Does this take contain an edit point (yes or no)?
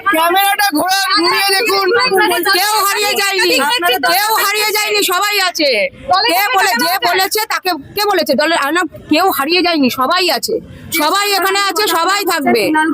yes